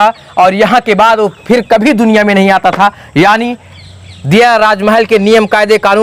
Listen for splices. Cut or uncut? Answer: uncut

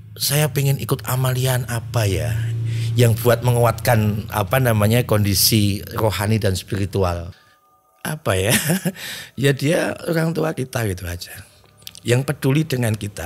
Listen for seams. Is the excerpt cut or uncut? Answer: cut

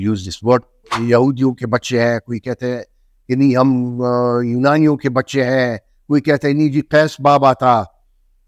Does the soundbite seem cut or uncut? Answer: cut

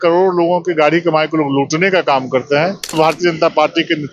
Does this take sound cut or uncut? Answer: cut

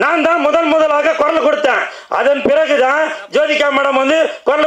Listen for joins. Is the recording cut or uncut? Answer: uncut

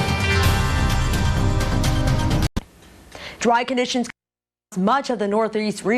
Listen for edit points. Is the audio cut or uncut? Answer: cut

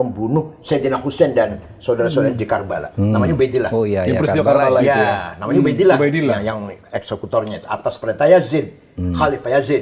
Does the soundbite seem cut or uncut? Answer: uncut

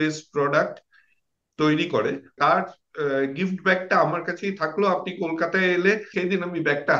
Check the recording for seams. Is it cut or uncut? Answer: cut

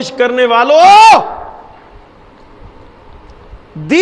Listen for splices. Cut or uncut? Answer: uncut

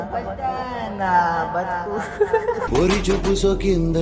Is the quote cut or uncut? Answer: uncut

